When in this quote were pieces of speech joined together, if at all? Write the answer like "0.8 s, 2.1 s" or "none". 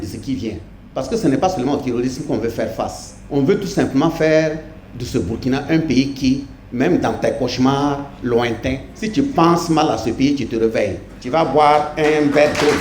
none